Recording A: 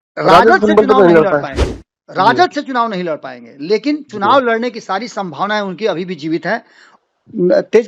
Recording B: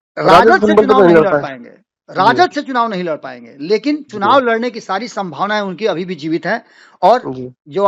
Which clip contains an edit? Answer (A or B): A